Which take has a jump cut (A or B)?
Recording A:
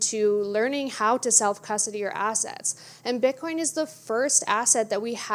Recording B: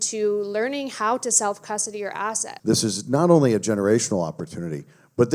B